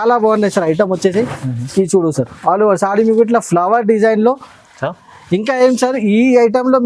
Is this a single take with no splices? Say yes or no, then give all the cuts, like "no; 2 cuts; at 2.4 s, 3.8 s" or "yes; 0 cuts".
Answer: yes; 0 cuts